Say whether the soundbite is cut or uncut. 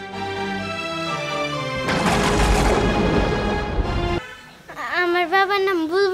cut